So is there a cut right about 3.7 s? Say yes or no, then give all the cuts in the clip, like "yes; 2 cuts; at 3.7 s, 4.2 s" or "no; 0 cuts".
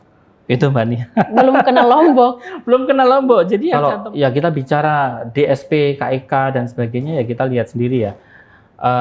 yes; 1 cut; at 3.7 s